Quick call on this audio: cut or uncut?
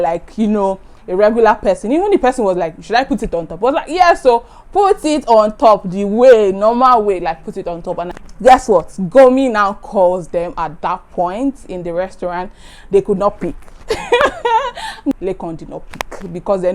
cut